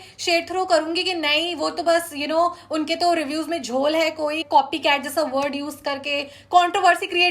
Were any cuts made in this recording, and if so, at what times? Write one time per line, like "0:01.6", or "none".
0:04.4